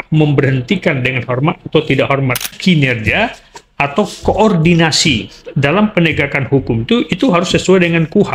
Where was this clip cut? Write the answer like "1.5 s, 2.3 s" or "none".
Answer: 2.6 s